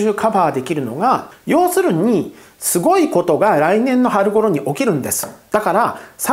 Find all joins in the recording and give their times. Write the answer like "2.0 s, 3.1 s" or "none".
1.3 s